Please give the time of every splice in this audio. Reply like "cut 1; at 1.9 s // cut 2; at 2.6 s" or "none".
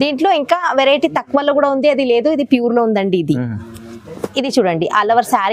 none